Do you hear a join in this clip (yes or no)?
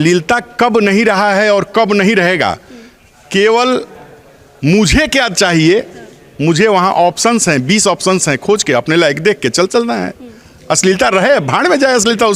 no